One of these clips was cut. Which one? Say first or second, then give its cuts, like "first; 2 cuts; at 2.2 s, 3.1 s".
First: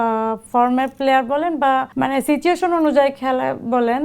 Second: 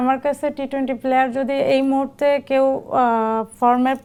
first; 1 cut; at 1.9 s